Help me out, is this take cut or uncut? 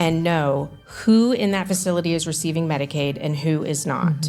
uncut